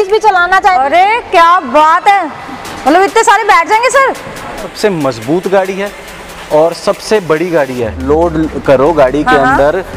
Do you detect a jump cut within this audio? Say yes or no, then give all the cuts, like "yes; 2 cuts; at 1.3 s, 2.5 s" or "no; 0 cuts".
yes; 3 cuts; at 0.8 s, 4.6 s, 8.0 s